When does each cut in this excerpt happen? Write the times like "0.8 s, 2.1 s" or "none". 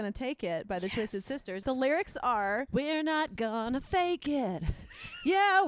1.5 s, 2.7 s